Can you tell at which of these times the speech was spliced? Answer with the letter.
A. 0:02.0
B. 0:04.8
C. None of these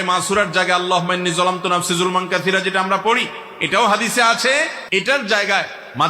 B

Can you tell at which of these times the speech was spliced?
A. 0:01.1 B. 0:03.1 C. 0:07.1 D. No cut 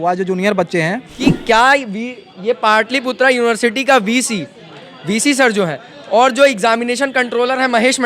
A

